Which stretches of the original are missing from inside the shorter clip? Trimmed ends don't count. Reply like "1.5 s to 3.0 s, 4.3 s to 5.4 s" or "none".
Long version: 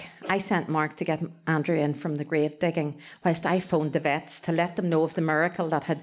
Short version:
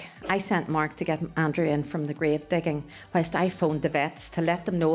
1.3 s to 1.4 s

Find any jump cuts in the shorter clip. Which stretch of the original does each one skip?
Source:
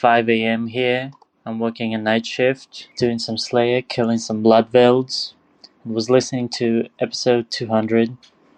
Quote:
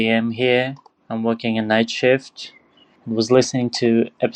2.8 s to 5.2 s

